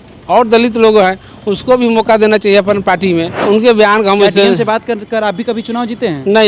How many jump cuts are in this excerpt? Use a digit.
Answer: 1